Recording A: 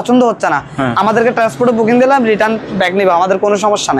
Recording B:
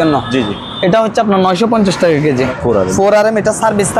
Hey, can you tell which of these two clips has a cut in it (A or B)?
B